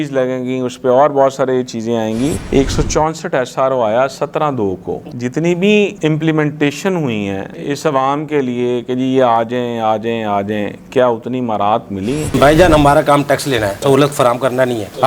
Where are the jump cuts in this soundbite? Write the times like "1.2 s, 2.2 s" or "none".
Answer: 2.5 s, 5.0 s, 7.5 s, 12.3 s

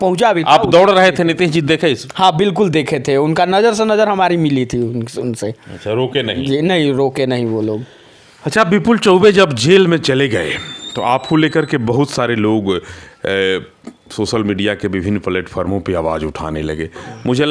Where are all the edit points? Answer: none

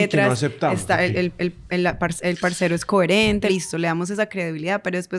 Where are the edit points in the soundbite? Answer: 3.5 s

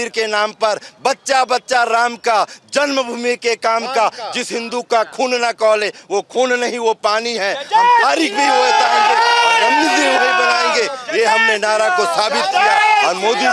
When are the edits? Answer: none

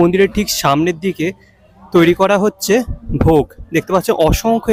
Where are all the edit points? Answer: none

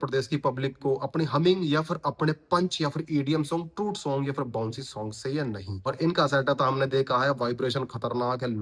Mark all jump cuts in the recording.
5.9 s

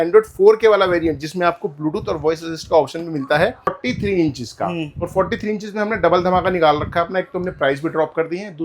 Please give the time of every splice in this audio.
3.8 s

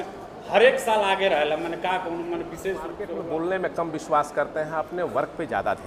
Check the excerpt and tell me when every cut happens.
3.1 s

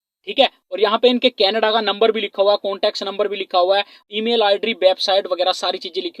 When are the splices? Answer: none

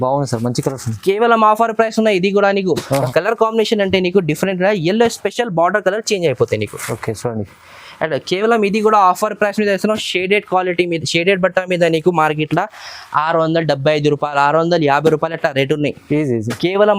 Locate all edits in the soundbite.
3.1 s

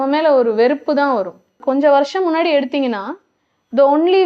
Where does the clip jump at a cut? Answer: 1.6 s

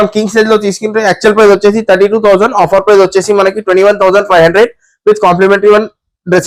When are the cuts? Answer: none

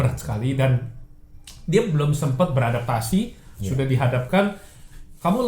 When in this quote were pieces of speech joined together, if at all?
none

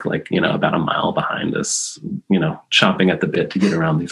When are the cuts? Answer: none

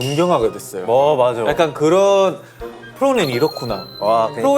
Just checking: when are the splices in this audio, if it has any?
2.8 s

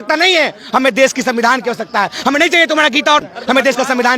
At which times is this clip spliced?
3.2 s

